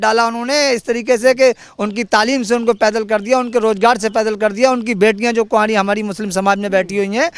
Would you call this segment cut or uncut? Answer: uncut